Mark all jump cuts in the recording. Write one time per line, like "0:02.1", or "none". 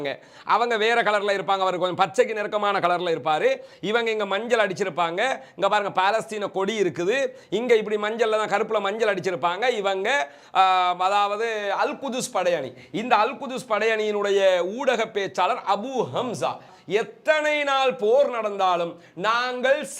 0:16.7